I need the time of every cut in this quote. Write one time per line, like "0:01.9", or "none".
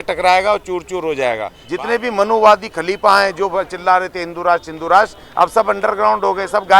0:01.6